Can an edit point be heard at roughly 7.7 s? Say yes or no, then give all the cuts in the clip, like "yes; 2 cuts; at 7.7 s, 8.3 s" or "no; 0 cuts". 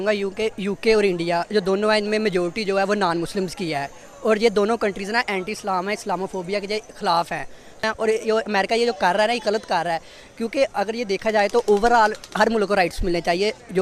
no; 0 cuts